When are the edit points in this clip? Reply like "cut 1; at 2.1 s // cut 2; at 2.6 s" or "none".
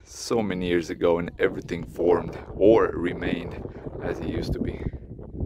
none